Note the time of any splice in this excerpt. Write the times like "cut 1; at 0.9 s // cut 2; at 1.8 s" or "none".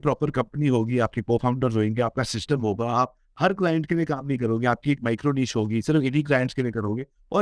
none

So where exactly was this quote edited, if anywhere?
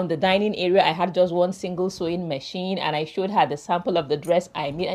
none

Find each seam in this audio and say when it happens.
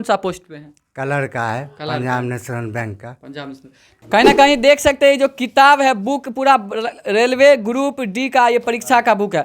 cut 1; at 4.1 s

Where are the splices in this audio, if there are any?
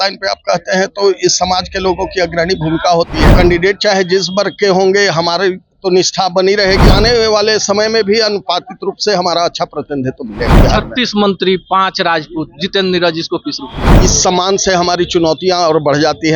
cut 1; at 3.3 s // cut 2; at 6.9 s // cut 3; at 10.5 s // cut 4; at 13.9 s

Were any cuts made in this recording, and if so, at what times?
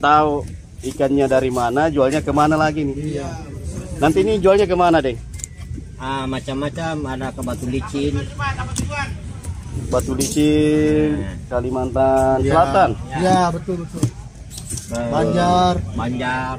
none

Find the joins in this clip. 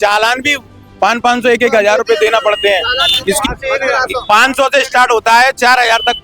cut 1; at 3.4 s

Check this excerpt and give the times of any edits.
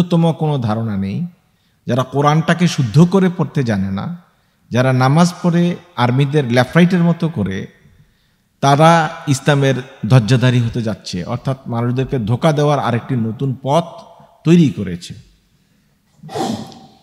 none

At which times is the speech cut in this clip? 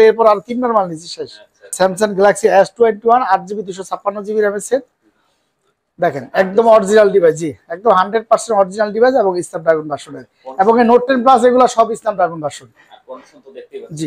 cut 1; at 1.7 s

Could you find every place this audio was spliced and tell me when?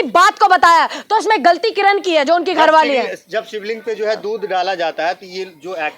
none

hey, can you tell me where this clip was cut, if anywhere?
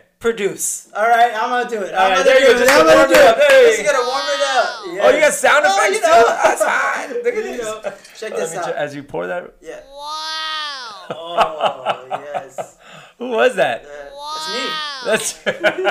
none

